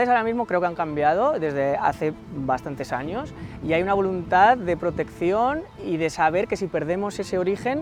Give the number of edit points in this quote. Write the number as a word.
zero